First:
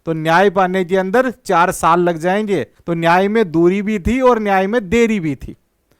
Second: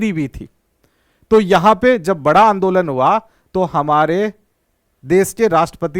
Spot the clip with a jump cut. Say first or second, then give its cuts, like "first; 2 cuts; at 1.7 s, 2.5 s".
first; 1 cut; at 2.8 s